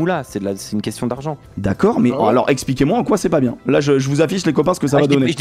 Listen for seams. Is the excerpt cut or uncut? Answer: uncut